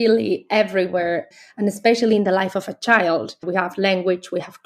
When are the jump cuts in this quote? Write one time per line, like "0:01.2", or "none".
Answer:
0:01.3
0:03.4